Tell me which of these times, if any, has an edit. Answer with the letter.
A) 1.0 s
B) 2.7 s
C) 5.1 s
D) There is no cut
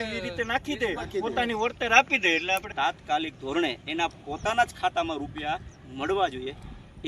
B